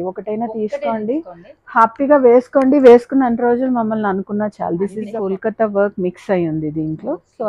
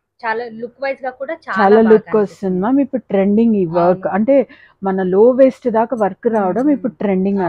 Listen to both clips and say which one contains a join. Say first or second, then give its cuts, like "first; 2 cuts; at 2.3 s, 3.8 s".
first; 1 cut; at 5.1 s